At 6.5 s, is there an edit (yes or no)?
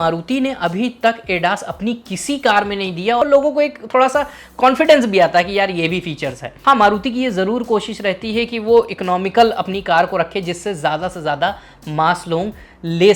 yes